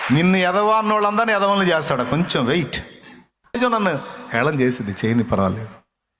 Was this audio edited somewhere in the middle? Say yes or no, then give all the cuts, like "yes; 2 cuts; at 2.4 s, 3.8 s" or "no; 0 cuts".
yes; 1 cut; at 3.5 s